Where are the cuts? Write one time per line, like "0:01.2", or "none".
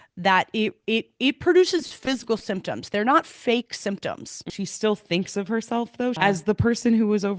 0:04.4
0:06.2

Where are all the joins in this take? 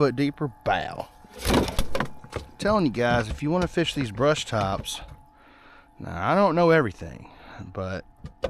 none

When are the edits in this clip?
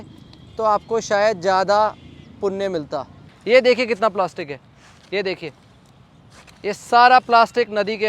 0:03.3

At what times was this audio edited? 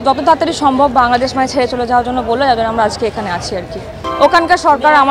0:04.0

